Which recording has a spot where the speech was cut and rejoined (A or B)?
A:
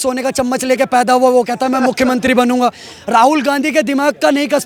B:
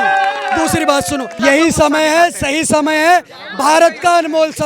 B